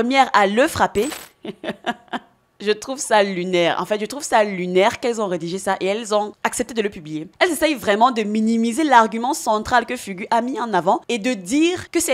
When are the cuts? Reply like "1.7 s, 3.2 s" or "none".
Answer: 1.2 s, 11.0 s